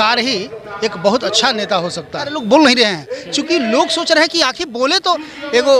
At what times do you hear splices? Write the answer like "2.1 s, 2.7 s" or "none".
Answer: 2.3 s